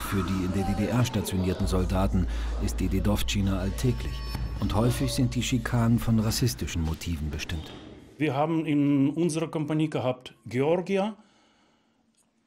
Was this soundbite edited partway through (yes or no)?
no